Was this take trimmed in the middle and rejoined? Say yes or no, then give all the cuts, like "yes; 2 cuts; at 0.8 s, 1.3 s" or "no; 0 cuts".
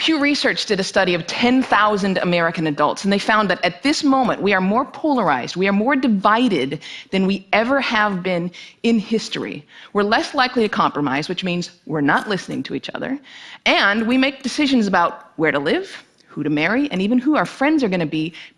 no; 0 cuts